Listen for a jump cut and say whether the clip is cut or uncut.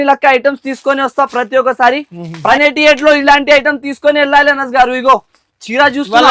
cut